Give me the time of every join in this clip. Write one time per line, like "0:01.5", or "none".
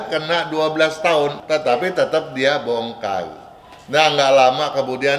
0:01.4